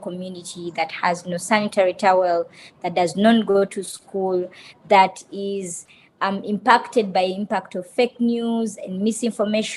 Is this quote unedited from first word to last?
yes; 0 cuts

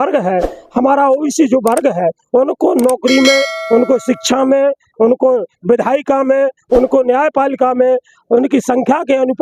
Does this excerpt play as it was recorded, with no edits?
yes; 0 cuts

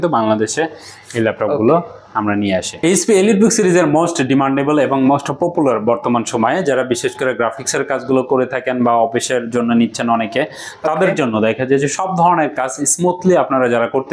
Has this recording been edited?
no; 0 cuts

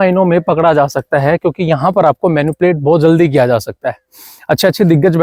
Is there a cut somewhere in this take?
no; 0 cuts

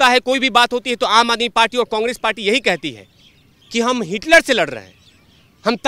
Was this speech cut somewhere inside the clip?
no; 0 cuts

